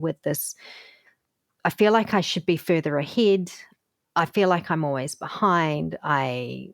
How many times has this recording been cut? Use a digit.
1